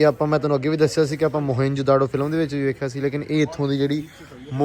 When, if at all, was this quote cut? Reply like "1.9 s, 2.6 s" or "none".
none